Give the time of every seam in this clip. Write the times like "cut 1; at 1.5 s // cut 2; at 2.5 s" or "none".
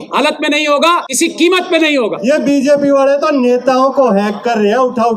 cut 1; at 1.1 s // cut 2; at 2.2 s